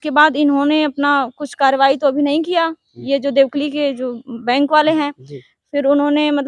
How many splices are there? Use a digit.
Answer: 0